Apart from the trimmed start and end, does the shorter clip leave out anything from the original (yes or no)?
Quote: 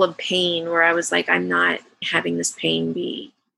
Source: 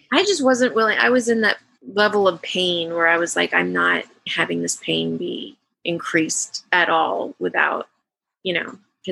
no